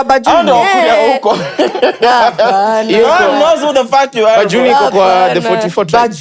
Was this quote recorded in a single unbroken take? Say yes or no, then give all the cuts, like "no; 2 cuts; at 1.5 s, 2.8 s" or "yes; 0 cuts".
yes; 0 cuts